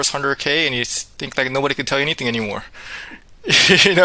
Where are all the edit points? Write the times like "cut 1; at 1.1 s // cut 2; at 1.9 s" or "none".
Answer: none